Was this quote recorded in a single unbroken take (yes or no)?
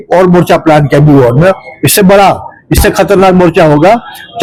yes